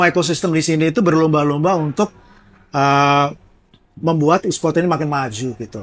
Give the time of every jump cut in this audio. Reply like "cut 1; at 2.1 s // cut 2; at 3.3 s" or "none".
none